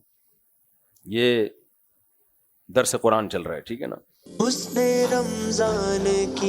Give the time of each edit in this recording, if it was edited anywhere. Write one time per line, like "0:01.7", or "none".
0:04.2